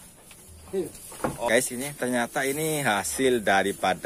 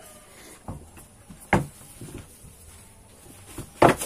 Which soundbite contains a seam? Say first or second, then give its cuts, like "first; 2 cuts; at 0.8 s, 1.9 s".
first; 1 cut; at 1.5 s